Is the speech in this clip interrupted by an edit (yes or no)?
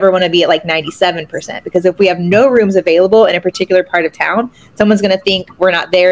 no